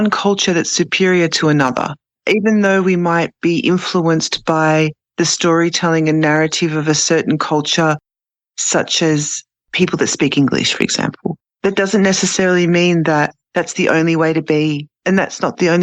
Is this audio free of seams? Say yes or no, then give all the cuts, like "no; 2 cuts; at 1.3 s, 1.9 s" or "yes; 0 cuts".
yes; 0 cuts